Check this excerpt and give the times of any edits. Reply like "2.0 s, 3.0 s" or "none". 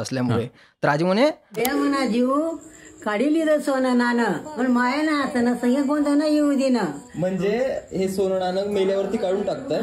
1.6 s